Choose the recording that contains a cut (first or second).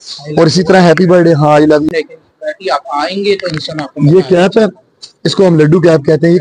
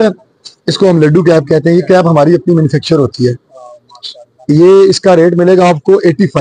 first